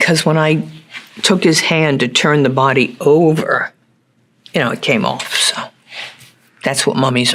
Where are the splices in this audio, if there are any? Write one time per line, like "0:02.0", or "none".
none